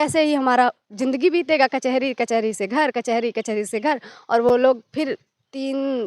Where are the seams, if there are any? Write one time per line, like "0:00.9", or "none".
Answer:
none

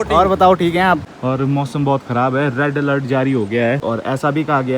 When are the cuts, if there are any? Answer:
0:01.1
0:03.8

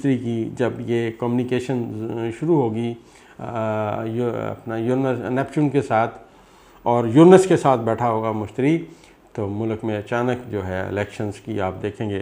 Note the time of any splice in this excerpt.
none

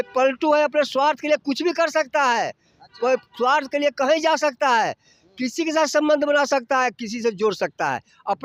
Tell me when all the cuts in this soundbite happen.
none

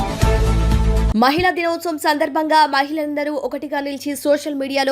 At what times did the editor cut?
0:01.1

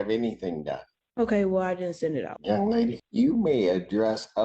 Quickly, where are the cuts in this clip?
0:02.3
0:03.0

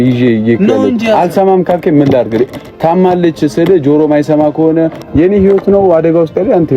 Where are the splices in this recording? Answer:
0:04.9

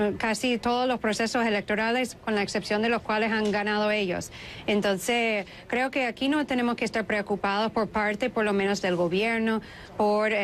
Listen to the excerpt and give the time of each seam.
0:04.1

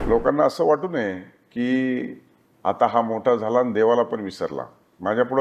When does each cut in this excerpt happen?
none

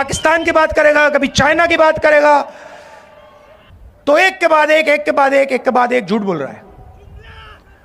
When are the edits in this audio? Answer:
0:03.8

